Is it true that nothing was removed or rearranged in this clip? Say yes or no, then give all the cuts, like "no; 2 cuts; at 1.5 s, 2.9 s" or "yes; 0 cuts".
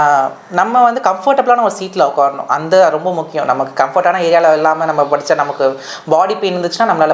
yes; 0 cuts